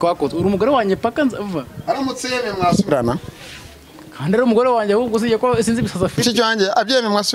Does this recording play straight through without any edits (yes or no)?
yes